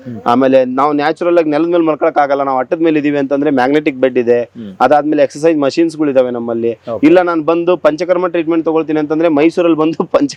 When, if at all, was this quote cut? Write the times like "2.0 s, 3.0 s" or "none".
none